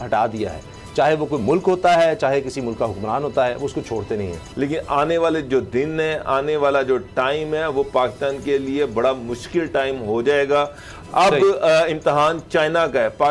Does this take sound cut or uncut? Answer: cut